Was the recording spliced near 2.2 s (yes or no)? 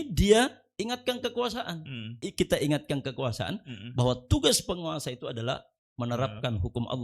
yes